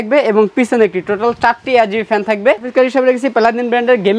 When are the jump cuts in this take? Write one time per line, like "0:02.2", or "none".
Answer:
0:02.7

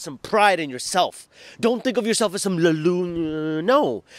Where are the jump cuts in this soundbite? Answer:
none

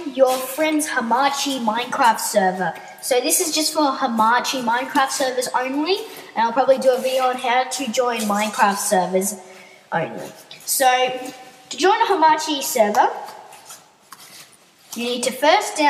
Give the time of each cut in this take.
0:13.0

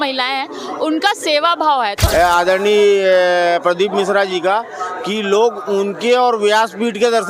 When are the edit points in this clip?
0:02.0

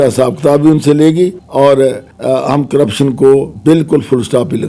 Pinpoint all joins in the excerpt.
0:01.4
0:02.1
0:03.5

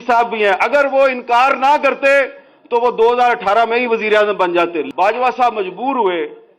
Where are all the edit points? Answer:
0:04.9

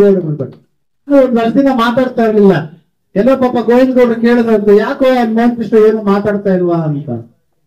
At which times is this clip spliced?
0:01.1

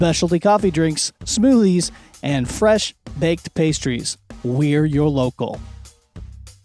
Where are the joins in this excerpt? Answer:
0:05.6

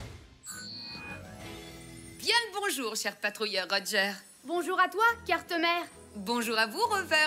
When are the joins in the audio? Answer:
0:02.2

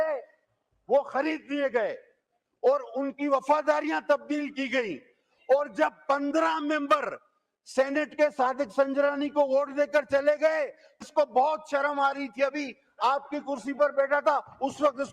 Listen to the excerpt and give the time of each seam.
0:11.1

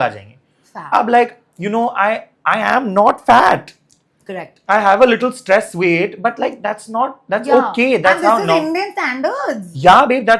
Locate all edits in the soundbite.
none

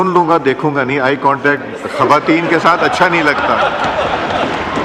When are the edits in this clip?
none

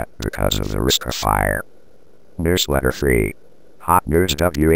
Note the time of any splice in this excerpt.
0:02.3

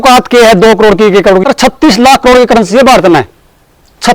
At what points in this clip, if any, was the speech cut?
0:01.4

